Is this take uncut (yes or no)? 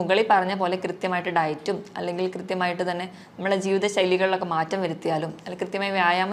yes